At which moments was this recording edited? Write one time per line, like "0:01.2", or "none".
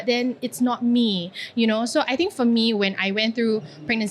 none